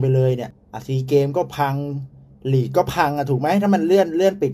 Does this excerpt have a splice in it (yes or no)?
no